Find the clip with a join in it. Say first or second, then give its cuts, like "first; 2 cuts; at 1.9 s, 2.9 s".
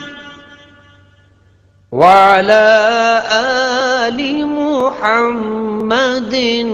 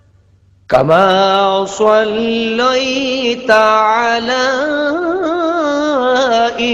first; 1 cut; at 3.7 s